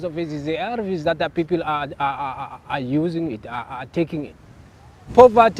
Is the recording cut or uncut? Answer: uncut